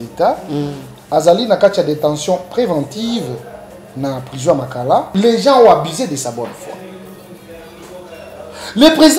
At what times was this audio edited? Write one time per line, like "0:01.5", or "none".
0:05.1